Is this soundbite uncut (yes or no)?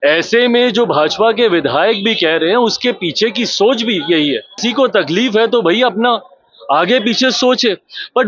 no